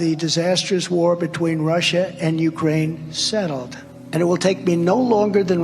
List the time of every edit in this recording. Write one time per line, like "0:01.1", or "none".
none